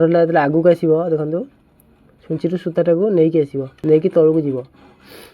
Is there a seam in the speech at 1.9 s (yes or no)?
no